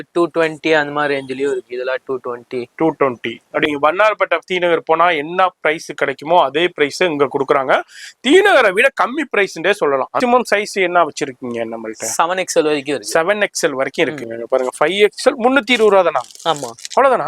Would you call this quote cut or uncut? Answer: cut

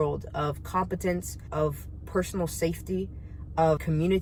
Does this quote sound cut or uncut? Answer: uncut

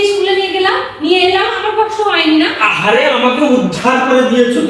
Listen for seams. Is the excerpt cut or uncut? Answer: uncut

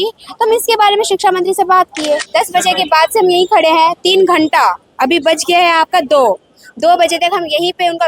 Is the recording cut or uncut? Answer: cut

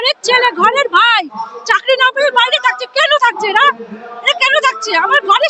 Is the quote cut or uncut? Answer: uncut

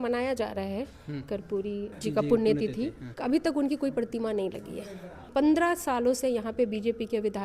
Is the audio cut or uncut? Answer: cut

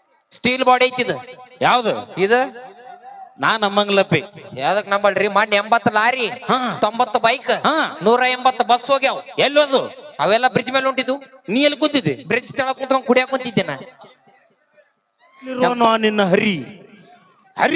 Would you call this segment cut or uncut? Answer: cut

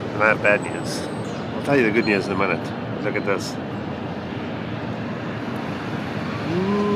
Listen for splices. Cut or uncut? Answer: uncut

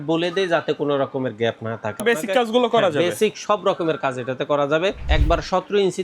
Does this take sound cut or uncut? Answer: cut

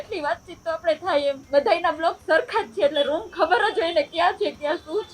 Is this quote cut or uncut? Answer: cut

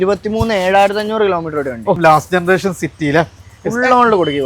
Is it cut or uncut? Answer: cut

